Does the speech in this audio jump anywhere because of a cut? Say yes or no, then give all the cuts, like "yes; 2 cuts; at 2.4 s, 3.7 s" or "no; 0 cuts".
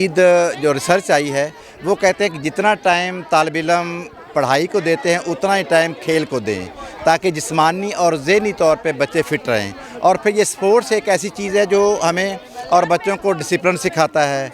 no; 0 cuts